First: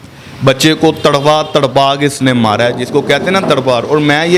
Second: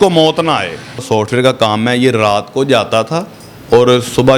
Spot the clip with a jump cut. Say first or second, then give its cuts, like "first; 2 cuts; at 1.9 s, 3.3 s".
second; 1 cut; at 1.0 s